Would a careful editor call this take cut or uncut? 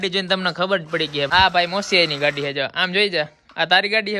cut